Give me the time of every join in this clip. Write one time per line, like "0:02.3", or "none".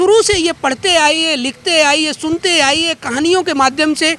none